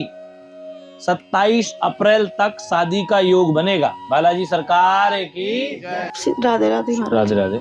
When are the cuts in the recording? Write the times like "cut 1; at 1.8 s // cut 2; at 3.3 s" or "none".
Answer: cut 1; at 6.1 s